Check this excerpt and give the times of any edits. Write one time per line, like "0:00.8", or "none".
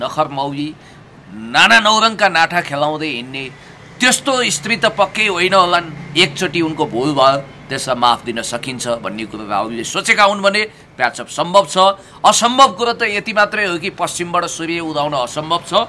none